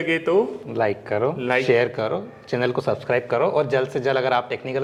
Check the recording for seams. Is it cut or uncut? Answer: uncut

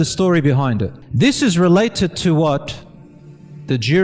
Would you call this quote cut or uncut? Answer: cut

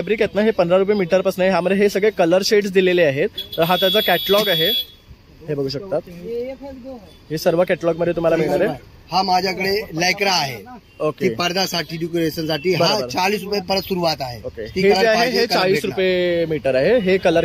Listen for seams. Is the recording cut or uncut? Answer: uncut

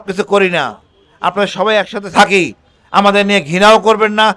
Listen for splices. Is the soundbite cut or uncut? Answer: uncut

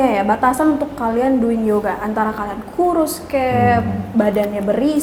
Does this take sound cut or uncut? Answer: uncut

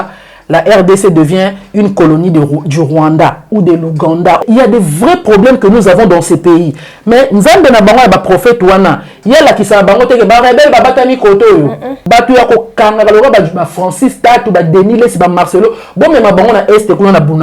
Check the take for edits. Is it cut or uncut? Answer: cut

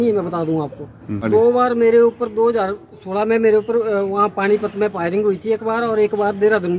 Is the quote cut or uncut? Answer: cut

